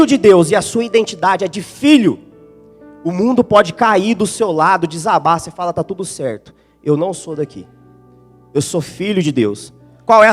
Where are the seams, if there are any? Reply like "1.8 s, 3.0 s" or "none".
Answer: none